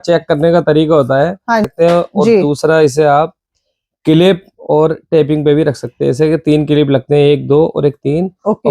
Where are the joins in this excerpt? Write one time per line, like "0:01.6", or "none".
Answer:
0:01.7

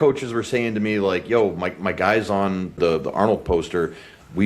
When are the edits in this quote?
0:02.8

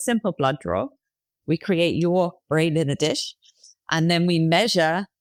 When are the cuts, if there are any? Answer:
none

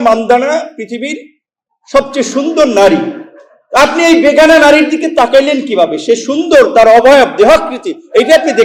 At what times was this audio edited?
none

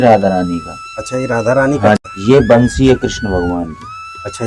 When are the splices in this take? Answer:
0:02.0

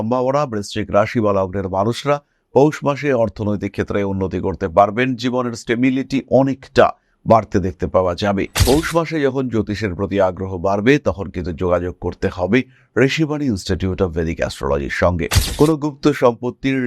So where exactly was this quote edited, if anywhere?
0:08.6
0:15.4

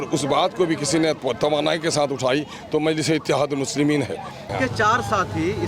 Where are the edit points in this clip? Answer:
0:04.5

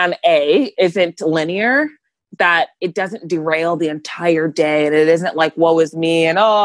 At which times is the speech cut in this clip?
none

